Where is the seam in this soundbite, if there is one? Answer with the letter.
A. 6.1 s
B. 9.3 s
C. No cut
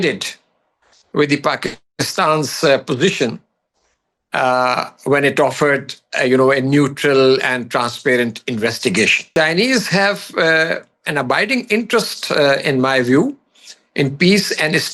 B